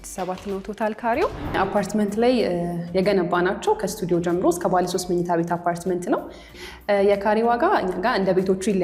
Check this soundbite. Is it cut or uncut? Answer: cut